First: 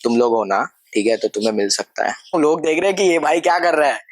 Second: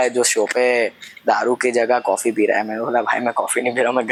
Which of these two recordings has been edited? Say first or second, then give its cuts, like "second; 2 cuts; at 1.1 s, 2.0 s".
first; 1 cut; at 2.3 s